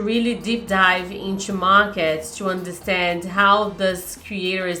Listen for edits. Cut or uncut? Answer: uncut